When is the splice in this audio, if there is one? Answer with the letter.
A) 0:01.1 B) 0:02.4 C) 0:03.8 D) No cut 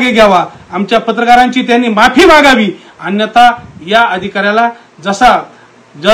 D